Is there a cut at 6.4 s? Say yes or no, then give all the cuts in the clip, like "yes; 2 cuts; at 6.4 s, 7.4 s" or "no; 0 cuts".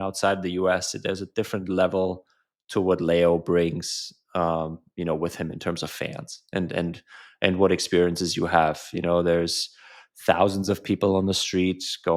no; 0 cuts